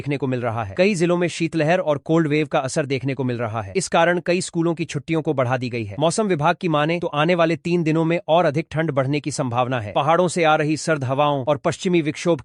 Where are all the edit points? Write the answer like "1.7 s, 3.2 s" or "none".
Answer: none